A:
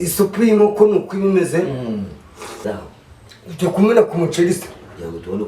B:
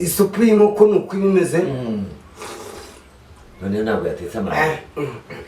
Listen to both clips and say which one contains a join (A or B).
A